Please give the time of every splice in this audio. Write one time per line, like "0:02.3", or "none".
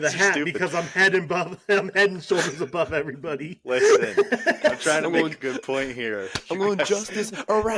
none